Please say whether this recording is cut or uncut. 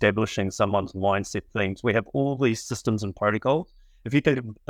uncut